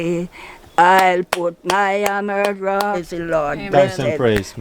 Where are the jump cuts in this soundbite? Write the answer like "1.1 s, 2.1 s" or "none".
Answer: 3.0 s